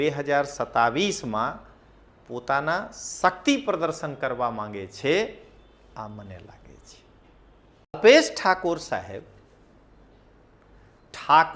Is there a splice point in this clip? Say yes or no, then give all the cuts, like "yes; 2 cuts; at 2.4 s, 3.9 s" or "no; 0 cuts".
yes; 1 cut; at 8.0 s